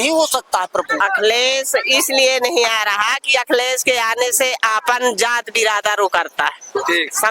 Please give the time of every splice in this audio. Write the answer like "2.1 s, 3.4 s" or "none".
1.0 s